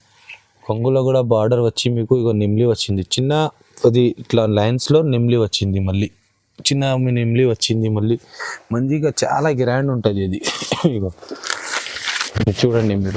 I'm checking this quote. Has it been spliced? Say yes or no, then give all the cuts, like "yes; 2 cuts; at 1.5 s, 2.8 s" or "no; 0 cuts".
no; 0 cuts